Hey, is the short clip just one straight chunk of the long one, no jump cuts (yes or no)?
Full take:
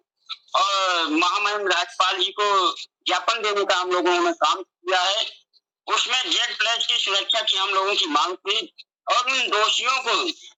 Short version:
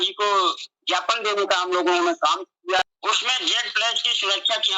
no